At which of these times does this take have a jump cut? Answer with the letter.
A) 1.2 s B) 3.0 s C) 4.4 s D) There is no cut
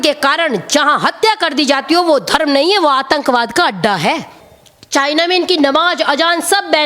C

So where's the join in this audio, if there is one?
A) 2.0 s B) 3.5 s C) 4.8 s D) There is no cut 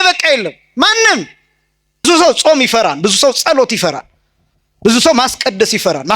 A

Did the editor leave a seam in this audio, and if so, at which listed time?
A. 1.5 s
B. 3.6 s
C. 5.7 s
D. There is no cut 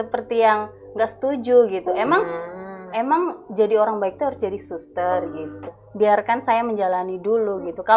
C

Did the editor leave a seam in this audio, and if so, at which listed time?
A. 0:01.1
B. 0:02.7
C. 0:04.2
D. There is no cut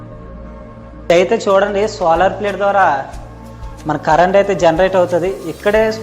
A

